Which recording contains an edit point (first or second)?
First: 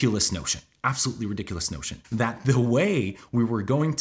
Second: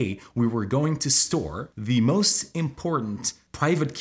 first